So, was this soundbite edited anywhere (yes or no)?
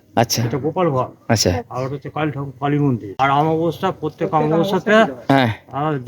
yes